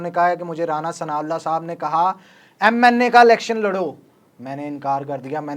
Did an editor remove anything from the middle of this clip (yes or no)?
no